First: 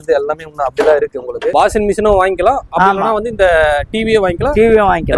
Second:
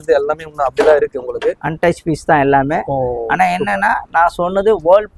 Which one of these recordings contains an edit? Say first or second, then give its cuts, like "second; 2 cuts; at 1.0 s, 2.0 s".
first; 1 cut; at 1.5 s